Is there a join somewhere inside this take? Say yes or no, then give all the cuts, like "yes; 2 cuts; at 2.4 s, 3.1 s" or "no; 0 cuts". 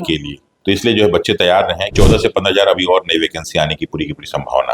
yes; 1 cut; at 1.9 s